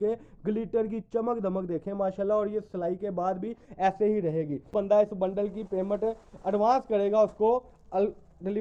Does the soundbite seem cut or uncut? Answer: cut